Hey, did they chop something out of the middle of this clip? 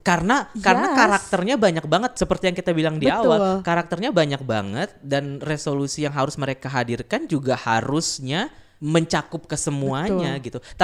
no; 0 cuts

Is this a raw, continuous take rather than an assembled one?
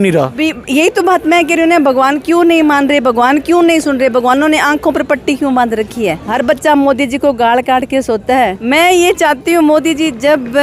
no; 2 cuts; at 6.2 s, 8.6 s

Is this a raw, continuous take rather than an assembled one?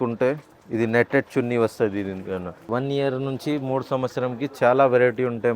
no; 1 cut; at 2.7 s

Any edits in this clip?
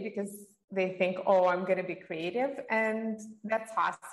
no; 0 cuts

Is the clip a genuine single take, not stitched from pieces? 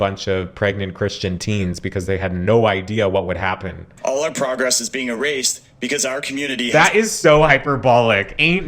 no; 1 cut; at 3.9 s

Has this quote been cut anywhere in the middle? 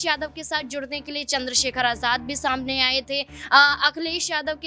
no; 0 cuts

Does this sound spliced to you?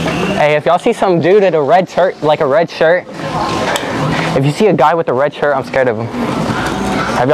no; 0 cuts

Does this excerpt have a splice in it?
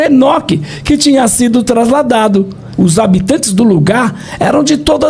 yes; 1 cut; at 2.6 s

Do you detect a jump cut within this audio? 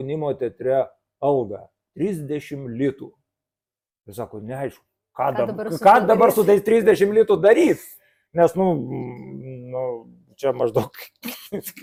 no; 0 cuts

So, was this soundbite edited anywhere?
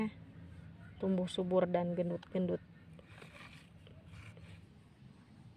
yes; 1 cut; at 4.6 s

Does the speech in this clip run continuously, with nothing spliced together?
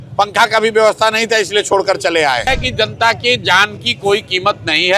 no; 1 cut; at 2.5 s

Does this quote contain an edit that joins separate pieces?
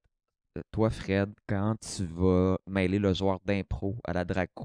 no; 0 cuts

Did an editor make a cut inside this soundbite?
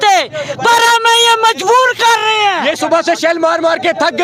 no; 0 cuts

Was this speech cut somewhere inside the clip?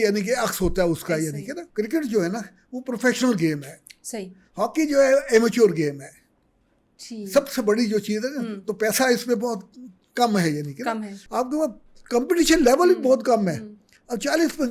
yes; 2 cuts; at 1.6 s, 11.2 s

